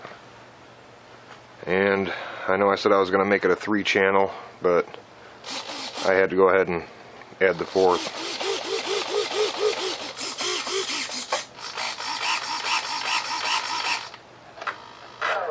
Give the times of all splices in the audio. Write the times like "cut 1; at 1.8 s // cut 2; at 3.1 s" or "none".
none